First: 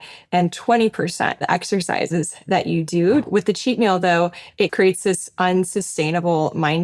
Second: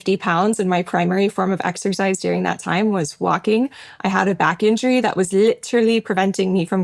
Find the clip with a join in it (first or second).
first